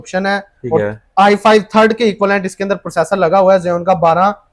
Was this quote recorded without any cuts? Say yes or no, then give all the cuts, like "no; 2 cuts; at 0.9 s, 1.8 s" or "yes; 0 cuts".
yes; 0 cuts